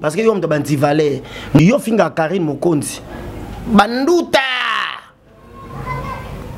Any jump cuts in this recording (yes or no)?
yes